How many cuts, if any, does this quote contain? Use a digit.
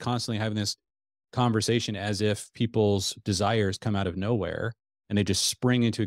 0